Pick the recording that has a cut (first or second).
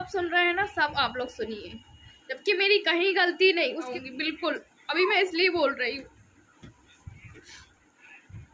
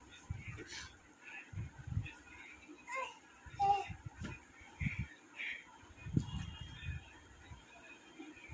first